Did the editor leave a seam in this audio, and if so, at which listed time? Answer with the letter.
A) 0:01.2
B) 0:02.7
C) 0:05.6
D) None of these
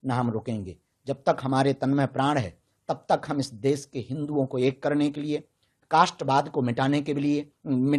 D